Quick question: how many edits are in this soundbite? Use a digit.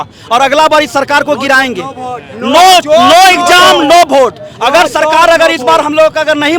0